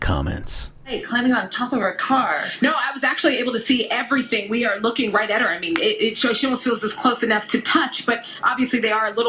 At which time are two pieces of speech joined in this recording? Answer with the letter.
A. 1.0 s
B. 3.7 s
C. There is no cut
A